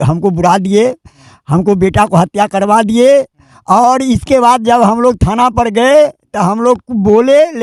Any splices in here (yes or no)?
no